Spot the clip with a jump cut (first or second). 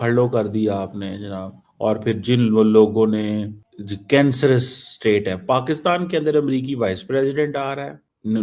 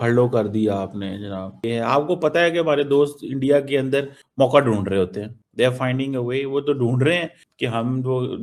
second